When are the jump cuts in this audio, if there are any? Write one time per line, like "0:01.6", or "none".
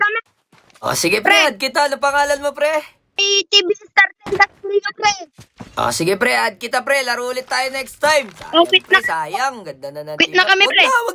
none